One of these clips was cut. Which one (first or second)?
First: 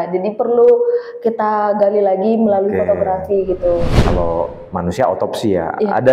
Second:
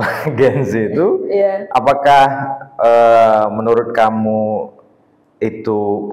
first